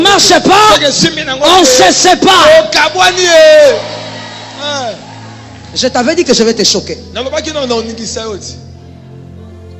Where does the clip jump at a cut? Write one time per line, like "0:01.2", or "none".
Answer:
none